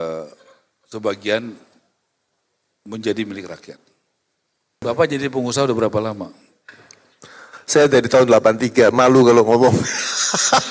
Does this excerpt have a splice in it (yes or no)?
yes